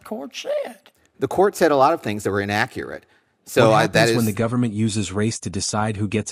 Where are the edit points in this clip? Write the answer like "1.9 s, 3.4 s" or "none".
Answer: 4.2 s